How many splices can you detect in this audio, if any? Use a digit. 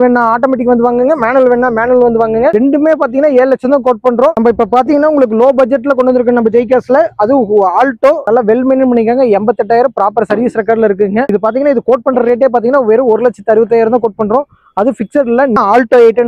4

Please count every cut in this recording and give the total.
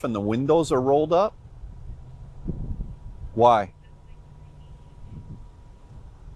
0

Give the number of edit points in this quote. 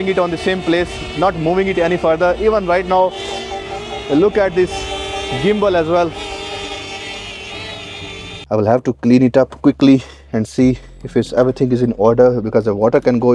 1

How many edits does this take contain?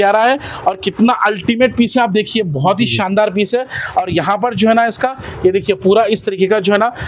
0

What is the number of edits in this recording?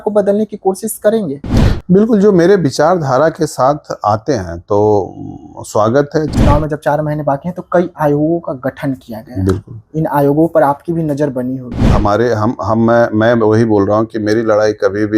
2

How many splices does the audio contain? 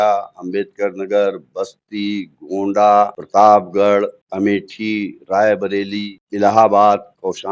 3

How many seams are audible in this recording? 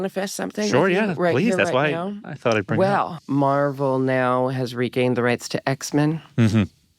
1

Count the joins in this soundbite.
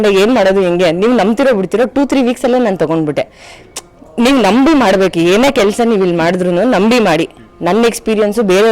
0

